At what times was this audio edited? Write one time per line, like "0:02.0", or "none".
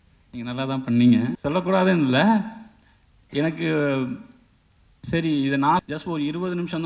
0:01.4
0:05.8